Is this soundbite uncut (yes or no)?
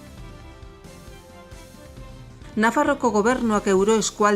no